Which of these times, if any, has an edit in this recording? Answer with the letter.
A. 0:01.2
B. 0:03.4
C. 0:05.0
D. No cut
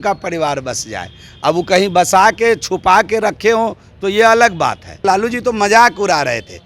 C